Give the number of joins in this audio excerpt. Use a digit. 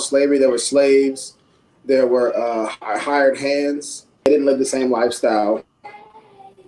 1